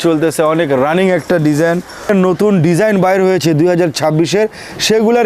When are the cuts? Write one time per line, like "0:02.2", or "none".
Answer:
0:02.1